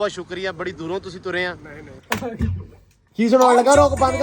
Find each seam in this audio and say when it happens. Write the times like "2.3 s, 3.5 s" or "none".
2.0 s